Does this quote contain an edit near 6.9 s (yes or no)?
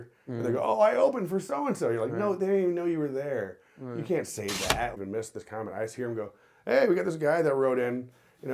no